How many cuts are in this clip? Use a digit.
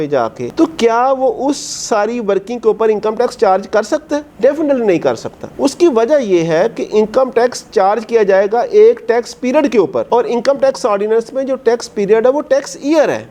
0